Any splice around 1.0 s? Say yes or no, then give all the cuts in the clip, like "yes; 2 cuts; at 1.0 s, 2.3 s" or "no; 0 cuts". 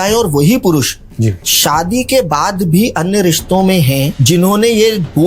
no; 0 cuts